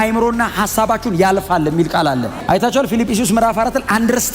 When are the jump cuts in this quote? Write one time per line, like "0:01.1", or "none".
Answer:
0:02.4